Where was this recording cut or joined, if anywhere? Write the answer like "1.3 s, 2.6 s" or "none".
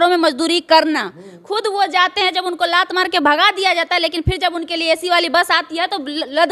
none